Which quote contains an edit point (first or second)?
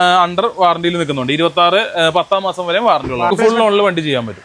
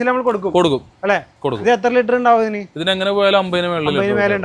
first